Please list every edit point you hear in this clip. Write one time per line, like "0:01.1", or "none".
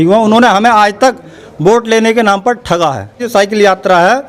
0:03.2